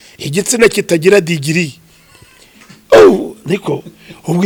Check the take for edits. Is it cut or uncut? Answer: uncut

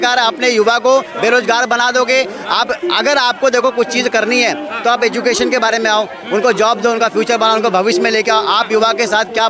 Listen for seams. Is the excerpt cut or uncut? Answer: uncut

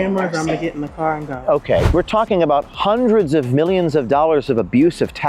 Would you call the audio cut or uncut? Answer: cut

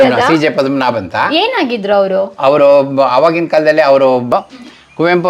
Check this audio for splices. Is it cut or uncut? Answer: cut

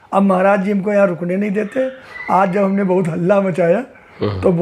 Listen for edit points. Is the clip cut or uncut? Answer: uncut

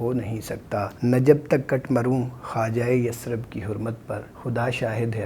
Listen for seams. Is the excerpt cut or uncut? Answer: cut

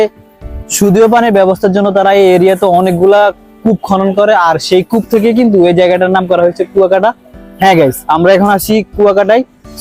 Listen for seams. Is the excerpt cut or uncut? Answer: uncut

